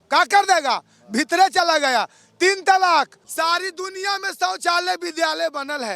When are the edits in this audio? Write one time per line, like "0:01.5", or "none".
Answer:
0:03.2